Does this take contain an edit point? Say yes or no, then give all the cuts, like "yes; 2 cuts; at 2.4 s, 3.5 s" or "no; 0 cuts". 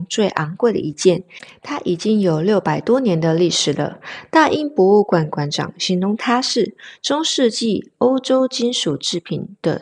no; 0 cuts